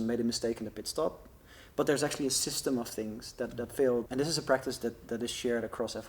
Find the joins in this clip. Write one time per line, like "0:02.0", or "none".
0:04.1

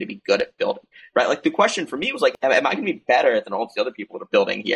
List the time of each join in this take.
0:02.4

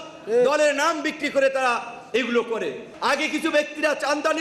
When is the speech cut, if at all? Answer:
0:02.8

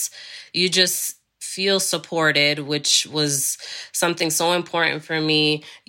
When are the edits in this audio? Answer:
0:01.5

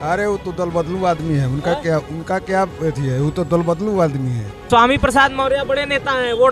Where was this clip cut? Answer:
0:04.6

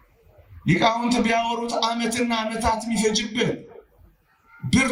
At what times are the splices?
none

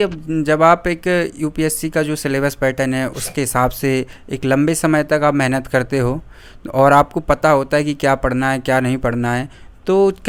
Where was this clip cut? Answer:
none

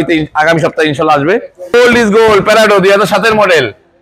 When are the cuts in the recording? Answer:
0:01.7

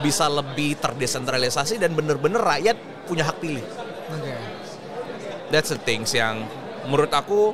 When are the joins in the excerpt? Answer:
none

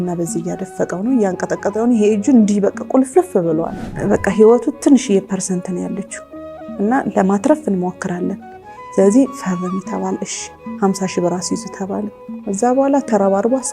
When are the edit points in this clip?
0:03.8
0:12.3

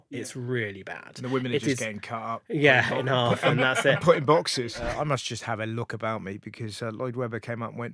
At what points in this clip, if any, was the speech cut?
0:04.7

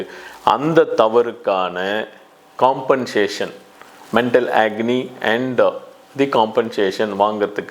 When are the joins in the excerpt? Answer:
none

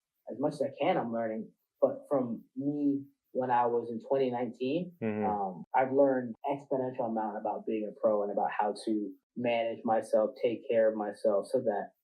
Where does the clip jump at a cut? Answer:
0:05.6
0:06.3
0:09.2

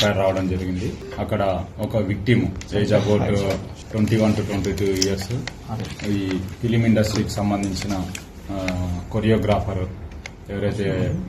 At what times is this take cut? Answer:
0:01.0
0:03.8

